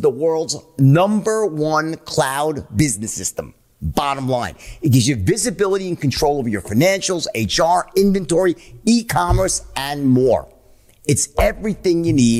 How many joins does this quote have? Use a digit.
0